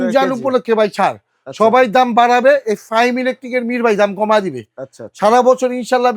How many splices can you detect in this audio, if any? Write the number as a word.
zero